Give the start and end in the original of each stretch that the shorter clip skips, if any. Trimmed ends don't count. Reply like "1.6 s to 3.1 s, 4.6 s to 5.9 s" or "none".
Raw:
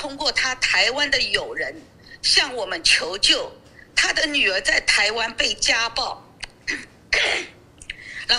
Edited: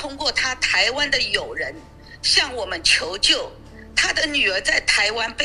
none

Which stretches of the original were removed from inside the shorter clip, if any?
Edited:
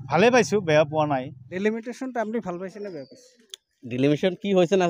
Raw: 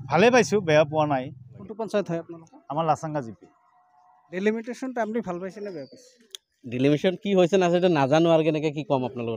1.4 s to 4.2 s

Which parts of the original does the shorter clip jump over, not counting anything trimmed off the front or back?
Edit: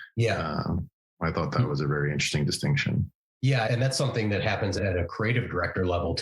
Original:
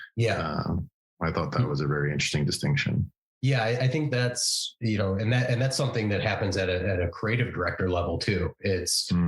3.7 s to 5.5 s, 6.6 s to 6.8 s

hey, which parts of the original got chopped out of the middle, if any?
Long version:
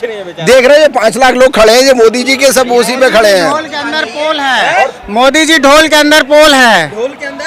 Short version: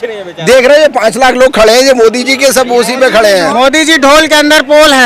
3.5 s to 5.1 s

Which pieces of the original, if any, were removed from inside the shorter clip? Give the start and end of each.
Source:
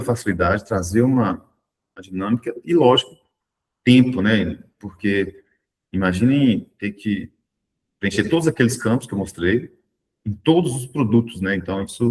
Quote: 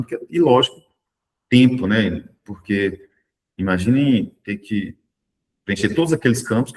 none

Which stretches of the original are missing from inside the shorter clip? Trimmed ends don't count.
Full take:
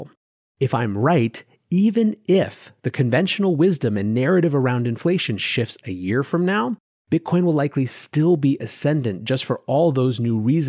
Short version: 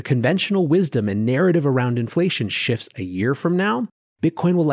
none

